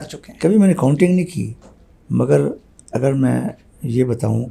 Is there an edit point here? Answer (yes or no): no